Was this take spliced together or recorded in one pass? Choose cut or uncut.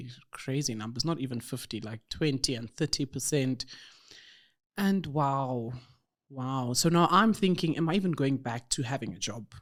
uncut